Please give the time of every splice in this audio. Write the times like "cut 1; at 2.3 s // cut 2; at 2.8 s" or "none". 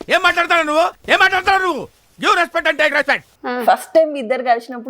cut 1; at 3.2 s